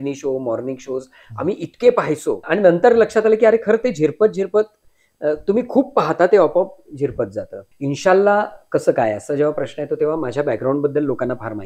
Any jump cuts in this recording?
yes; 2 cuts; at 2.4 s, 7.6 s

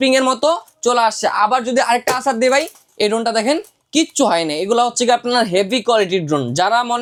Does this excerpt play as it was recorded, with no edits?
yes; 0 cuts

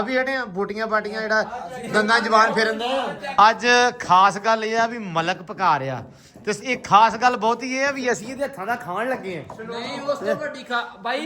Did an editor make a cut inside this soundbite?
yes; 1 cut; at 3.2 s

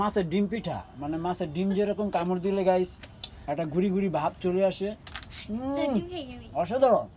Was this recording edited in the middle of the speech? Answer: no; 0 cuts

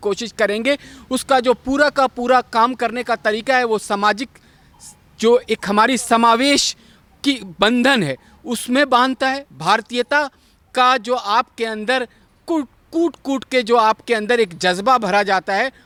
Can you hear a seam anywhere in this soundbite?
no; 0 cuts

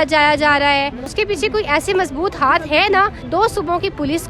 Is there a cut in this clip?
yes; 2 cuts; at 1.0 s, 3.2 s

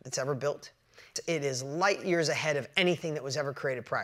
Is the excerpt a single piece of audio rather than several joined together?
no; 1 cut; at 1.2 s

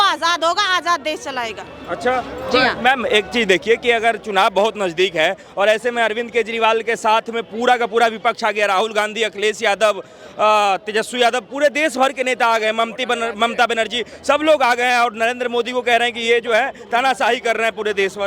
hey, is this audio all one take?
yes; 0 cuts

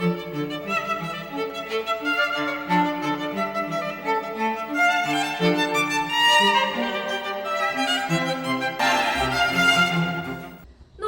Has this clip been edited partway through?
no; 0 cuts

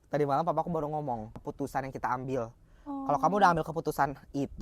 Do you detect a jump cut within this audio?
yes; 1 cut; at 1.4 s

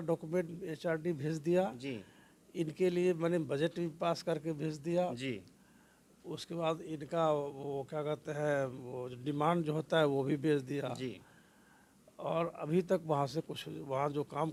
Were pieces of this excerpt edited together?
no; 0 cuts

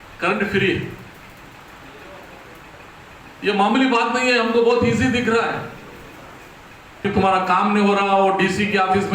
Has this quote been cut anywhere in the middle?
yes; 1 cut; at 7.1 s

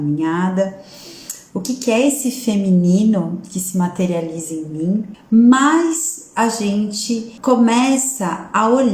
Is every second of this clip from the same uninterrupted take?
no; 2 cuts; at 5.2 s, 7.3 s

